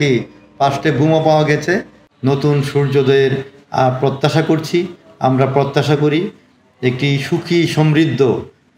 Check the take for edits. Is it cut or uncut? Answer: cut